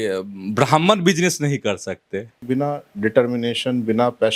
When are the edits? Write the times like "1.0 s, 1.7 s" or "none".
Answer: 2.4 s